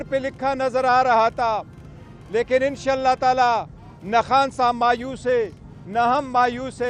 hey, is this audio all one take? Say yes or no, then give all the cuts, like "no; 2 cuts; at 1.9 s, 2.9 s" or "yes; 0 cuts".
yes; 0 cuts